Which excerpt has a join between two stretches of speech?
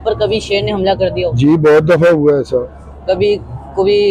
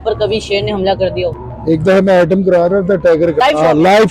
second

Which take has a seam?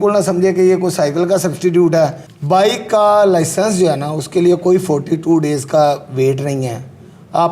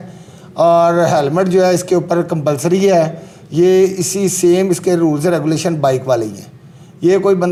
first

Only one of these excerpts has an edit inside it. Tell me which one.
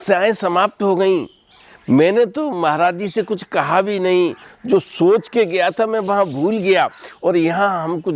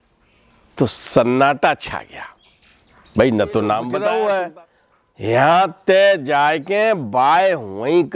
second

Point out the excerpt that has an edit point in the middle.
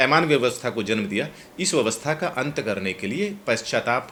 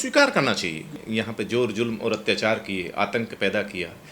second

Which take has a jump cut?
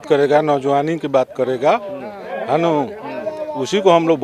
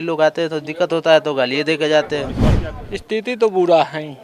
second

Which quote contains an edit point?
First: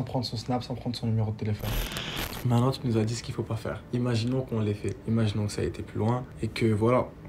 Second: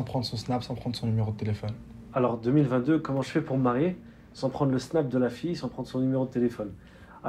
first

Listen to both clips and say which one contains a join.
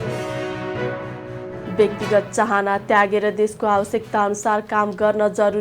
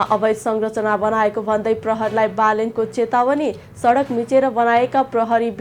first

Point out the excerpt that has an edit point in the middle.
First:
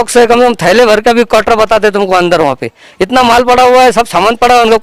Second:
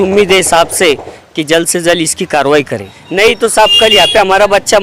second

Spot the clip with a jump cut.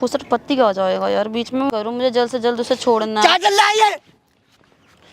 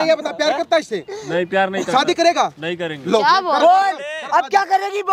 first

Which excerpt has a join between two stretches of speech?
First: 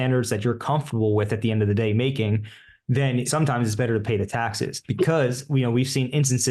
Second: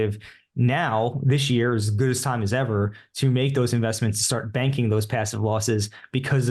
first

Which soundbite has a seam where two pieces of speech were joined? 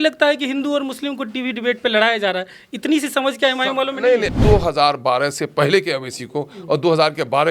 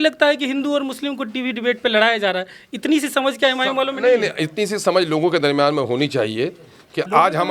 first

